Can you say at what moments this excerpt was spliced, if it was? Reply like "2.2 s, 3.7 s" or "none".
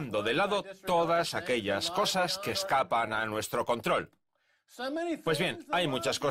none

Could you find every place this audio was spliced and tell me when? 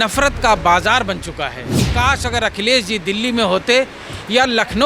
1.8 s

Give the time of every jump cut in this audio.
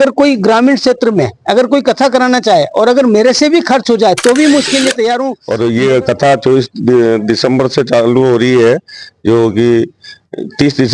5.4 s

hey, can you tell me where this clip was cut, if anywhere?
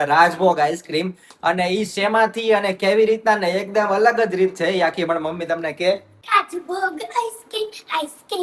6.2 s

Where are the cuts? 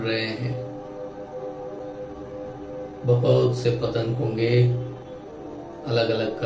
1.8 s

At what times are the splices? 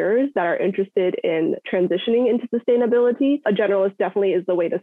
3.4 s

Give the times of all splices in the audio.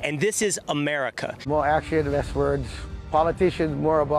1.3 s

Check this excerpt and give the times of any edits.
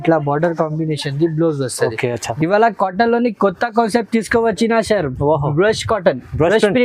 2.3 s

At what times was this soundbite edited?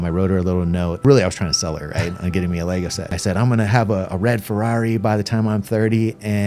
1.0 s, 3.2 s

